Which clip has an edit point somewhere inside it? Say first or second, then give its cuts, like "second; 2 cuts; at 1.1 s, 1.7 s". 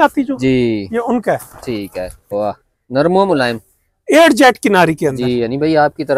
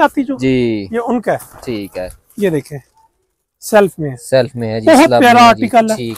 first; 1 cut; at 2.3 s